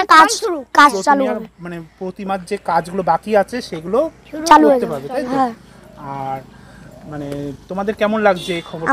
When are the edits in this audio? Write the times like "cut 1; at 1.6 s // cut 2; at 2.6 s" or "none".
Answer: none